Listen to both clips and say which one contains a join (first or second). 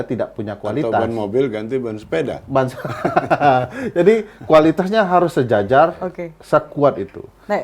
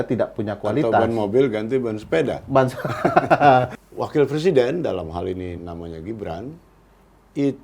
second